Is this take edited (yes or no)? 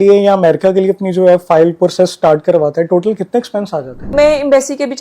yes